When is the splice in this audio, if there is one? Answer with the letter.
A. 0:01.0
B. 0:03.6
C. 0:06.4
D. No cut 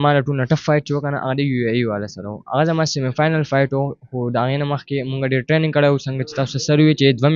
D